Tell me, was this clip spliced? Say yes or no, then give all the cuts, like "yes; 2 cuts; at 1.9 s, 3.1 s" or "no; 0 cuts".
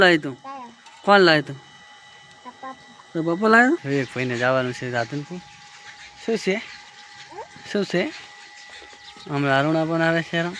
yes; 1 cut; at 3.8 s